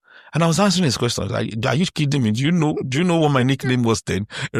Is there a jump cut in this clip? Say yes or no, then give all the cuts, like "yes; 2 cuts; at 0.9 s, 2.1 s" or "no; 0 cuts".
no; 0 cuts